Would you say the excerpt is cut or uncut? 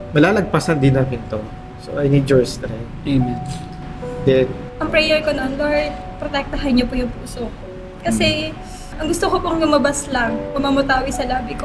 cut